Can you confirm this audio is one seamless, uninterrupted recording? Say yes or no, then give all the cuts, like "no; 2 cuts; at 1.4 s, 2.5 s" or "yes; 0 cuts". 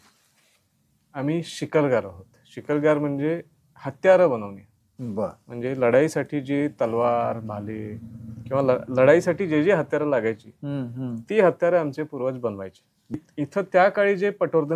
no; 1 cut; at 13.2 s